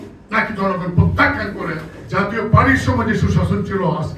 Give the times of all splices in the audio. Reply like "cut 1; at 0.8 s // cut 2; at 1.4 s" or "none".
cut 1; at 1.9 s